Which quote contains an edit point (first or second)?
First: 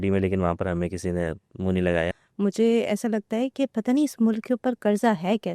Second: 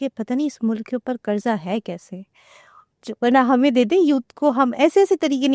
first